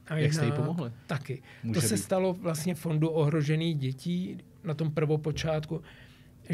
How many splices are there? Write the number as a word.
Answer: one